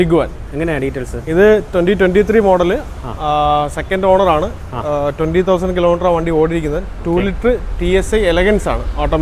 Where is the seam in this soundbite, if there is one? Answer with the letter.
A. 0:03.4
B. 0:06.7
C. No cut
C